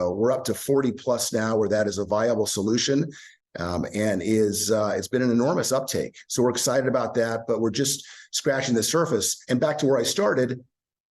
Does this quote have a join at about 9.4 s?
yes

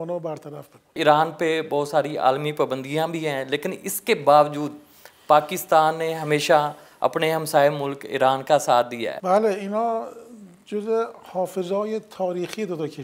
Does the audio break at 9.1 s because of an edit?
yes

